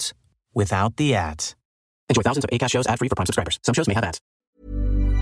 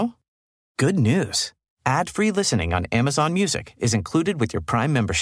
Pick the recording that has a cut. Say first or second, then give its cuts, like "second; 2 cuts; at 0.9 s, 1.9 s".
first; 1 cut; at 4.3 s